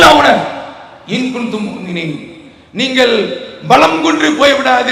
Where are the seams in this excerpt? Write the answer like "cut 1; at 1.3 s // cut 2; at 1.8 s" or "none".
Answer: none